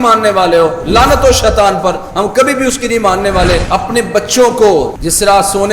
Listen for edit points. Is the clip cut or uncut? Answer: cut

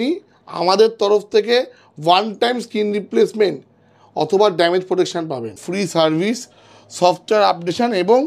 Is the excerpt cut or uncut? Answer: cut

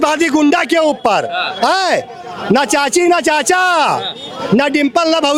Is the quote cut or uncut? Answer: uncut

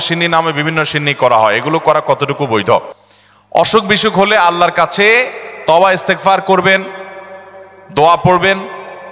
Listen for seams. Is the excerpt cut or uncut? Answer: uncut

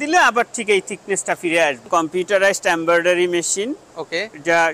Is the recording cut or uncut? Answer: cut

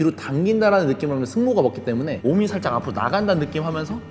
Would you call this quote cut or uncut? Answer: cut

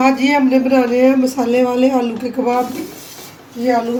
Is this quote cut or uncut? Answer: uncut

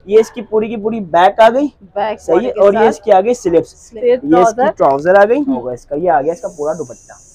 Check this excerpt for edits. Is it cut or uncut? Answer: cut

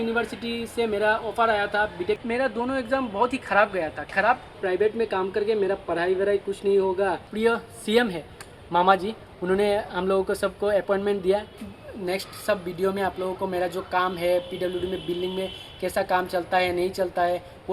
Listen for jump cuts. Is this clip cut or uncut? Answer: cut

